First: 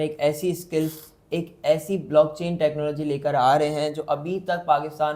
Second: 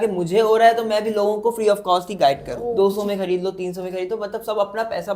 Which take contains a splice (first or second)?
second